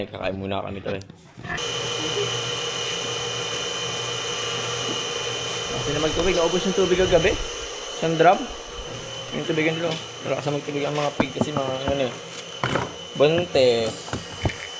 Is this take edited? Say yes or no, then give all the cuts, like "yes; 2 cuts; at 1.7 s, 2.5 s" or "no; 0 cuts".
yes; 1 cut; at 1.6 s